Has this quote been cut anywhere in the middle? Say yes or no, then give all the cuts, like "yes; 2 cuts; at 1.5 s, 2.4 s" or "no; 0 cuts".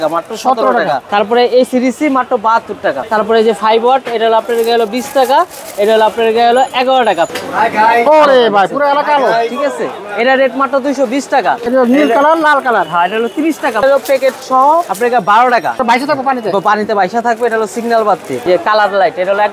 yes; 7 cuts; at 1.0 s, 3.1 s, 7.3 s, 11.6 s, 13.8 s, 15.8 s, 18.5 s